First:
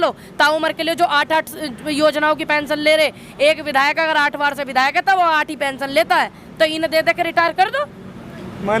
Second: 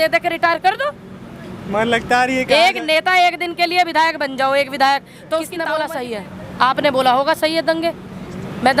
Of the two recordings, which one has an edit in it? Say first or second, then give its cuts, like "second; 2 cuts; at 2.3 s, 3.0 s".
second; 1 cut; at 5.8 s